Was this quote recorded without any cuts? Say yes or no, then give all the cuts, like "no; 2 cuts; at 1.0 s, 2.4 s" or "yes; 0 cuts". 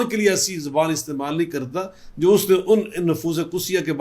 yes; 0 cuts